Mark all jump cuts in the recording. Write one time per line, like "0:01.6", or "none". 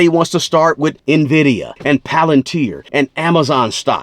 0:01.0
0:01.7
0:02.8